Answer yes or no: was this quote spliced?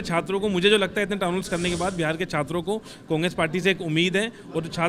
no